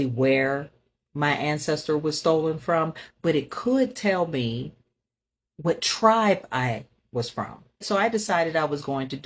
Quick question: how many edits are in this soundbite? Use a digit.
1